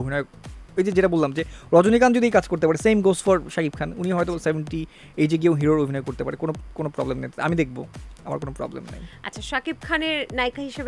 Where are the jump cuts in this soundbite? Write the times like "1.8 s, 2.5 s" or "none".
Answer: none